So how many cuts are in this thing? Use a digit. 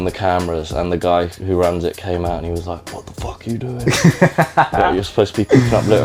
0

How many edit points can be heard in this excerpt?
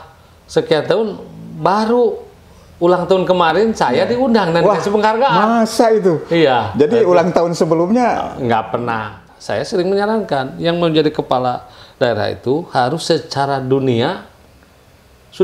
1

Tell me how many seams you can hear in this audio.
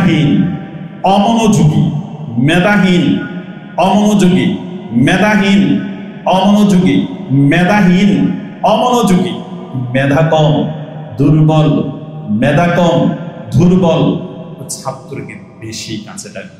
0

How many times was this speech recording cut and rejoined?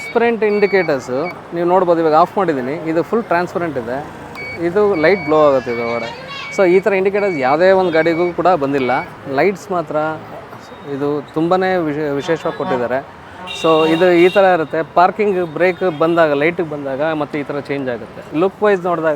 2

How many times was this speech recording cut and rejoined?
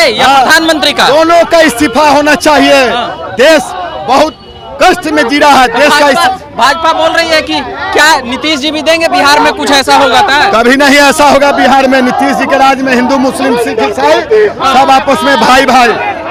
0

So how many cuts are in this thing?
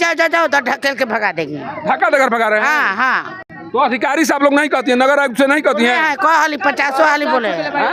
0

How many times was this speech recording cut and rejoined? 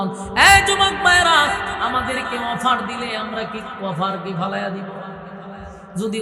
0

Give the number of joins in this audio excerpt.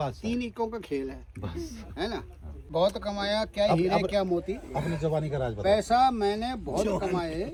0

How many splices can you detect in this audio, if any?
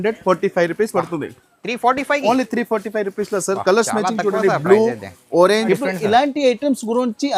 1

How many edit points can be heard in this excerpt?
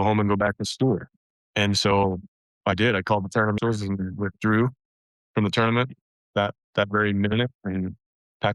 1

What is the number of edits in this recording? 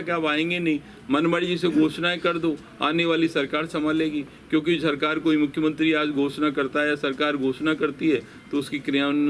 0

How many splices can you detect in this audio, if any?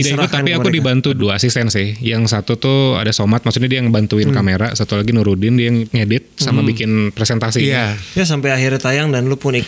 3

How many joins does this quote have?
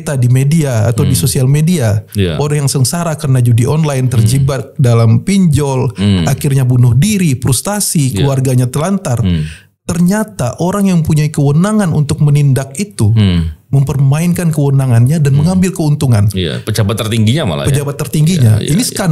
0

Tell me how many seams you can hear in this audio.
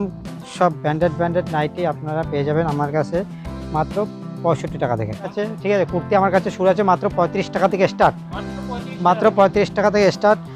1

